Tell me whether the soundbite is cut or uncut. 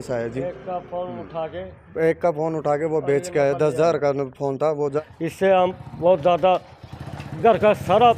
cut